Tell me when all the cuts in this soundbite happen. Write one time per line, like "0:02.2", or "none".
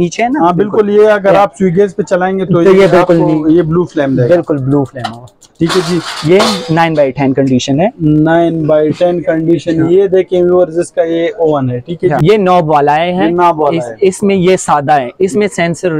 0:12.2